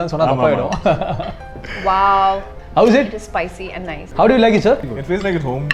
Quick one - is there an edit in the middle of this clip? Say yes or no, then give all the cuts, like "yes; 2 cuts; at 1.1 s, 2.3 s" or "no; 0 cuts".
yes; 3 cuts; at 2.5 s, 4.0 s, 4.9 s